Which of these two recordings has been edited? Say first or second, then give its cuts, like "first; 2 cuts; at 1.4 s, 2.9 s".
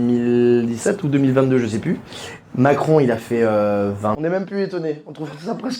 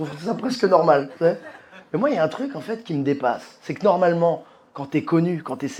first; 1 cut; at 4.1 s